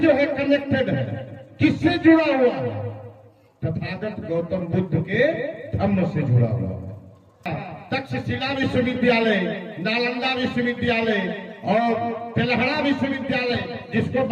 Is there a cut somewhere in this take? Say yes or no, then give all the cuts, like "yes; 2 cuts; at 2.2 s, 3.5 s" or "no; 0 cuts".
yes; 1 cut; at 7.4 s